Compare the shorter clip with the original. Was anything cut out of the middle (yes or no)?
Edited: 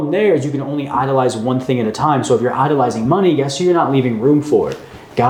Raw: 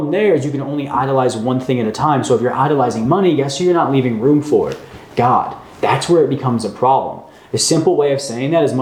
no